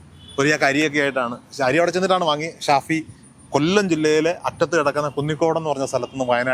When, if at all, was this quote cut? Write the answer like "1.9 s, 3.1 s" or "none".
none